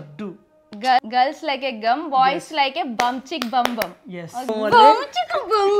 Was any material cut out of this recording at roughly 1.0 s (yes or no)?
yes